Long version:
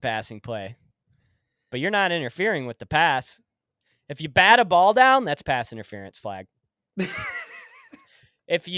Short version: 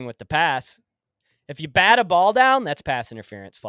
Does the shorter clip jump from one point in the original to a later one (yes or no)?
no